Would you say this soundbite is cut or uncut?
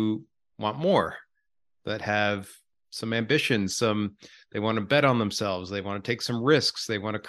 cut